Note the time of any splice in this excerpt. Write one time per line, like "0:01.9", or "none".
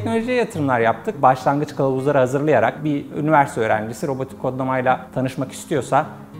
0:01.1
0:02.8

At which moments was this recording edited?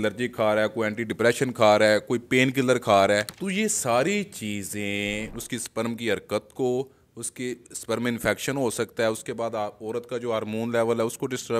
0:05.4

